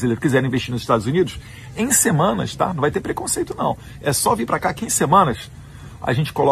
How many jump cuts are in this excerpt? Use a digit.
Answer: 0